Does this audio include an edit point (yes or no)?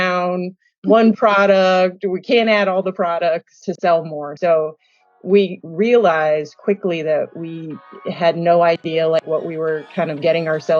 yes